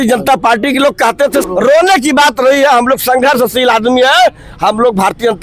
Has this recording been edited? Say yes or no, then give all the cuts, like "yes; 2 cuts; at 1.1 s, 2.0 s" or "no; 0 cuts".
yes; 1 cut; at 1.4 s